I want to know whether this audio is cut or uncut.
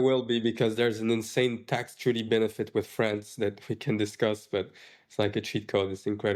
uncut